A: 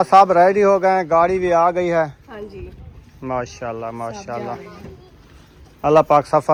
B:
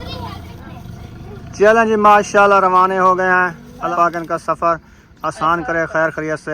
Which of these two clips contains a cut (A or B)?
B